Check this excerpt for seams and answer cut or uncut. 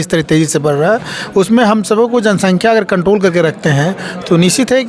uncut